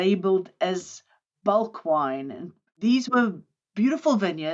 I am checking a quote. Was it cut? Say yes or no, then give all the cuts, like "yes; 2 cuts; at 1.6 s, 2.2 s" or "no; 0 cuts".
yes; 1 cut; at 2.6 s